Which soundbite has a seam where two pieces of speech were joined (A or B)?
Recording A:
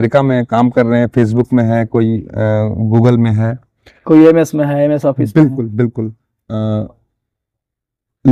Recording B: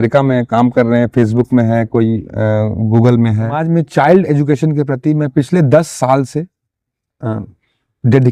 B